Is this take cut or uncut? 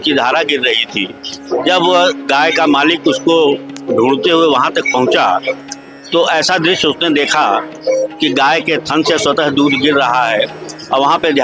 uncut